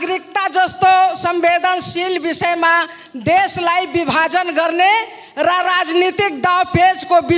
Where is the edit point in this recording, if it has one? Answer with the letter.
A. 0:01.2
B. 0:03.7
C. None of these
C